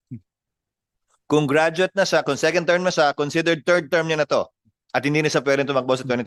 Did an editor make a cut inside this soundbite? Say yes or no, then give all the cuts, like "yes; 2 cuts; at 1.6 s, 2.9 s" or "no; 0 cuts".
no; 0 cuts